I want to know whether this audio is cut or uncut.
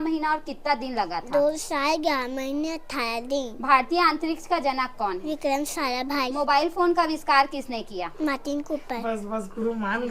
uncut